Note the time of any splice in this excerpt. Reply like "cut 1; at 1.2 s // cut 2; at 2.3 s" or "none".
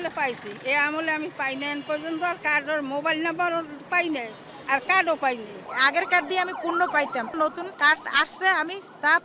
cut 1; at 5.6 s // cut 2; at 7.3 s